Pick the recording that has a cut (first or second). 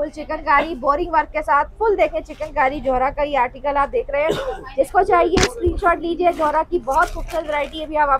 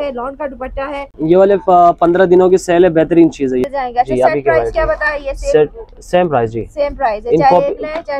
second